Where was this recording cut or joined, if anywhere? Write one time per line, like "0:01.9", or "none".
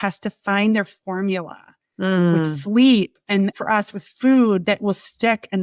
0:03.3
0:04.6